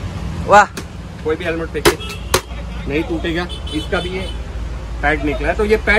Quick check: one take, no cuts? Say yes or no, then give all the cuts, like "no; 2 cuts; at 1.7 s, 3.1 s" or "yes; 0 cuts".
yes; 0 cuts